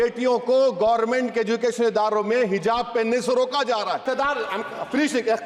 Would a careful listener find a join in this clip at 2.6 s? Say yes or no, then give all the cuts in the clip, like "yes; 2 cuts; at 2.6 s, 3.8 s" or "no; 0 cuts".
no; 1 cut; at 4.0 s